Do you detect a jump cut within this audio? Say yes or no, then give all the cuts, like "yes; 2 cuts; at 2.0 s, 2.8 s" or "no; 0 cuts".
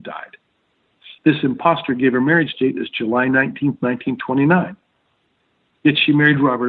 no; 0 cuts